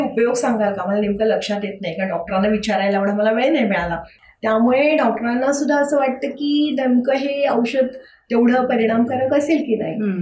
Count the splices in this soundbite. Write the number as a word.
one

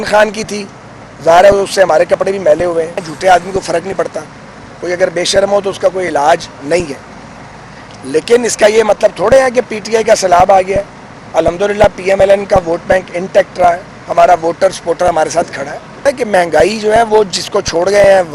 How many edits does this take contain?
two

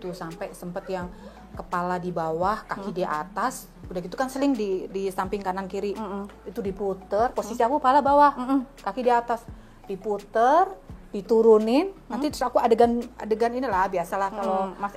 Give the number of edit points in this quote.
zero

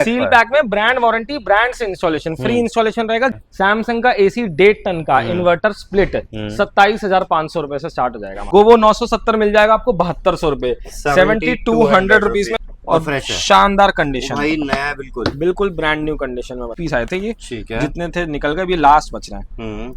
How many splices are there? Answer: four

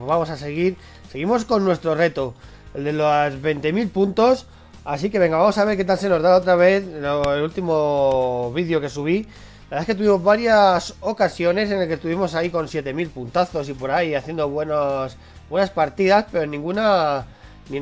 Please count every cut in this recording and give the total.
one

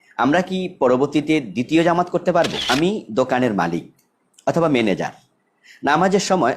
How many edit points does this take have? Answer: one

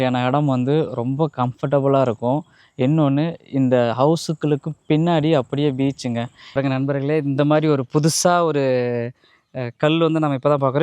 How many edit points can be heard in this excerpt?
one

